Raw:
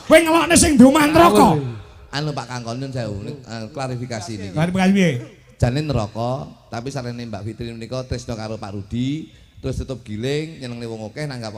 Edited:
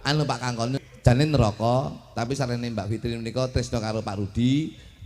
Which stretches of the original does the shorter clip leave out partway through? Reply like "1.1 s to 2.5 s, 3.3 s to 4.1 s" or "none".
3.3 s to 5.8 s

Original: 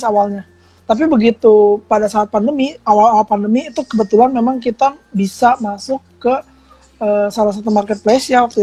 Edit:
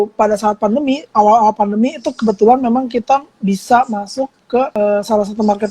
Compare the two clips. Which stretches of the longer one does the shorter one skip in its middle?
6.4 s to 7.0 s

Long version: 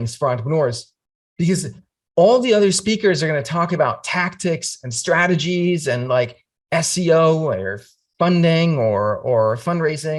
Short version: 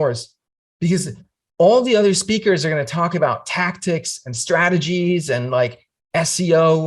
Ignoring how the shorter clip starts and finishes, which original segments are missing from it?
none

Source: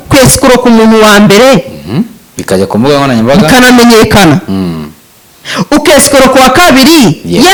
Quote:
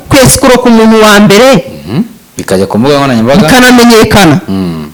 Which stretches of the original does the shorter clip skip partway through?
none

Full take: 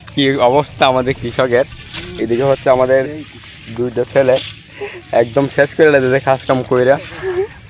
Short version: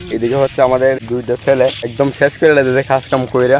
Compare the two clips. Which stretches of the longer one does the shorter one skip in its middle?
3.1 s to 3.7 s, 4.6 s to 5.3 s

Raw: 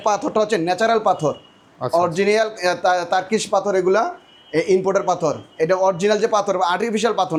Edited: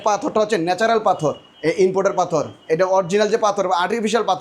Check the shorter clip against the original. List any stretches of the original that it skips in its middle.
1.5 s to 4.4 s

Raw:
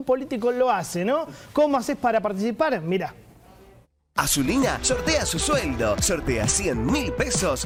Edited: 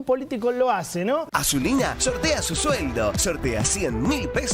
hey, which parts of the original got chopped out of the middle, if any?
1.3 s to 4.1 s

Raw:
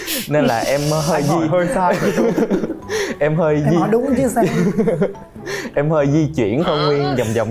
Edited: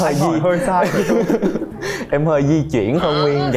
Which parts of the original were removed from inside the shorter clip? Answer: 2.8 s to 5.3 s

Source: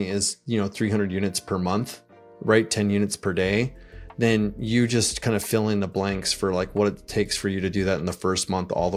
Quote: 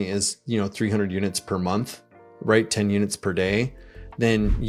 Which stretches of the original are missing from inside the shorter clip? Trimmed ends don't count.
none

